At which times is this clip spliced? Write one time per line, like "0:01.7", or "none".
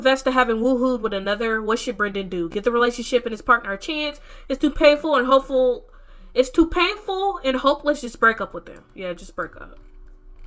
none